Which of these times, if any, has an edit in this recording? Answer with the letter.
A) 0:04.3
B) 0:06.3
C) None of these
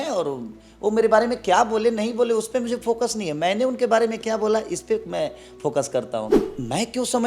B